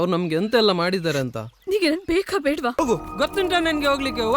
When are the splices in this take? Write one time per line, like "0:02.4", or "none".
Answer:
0:02.8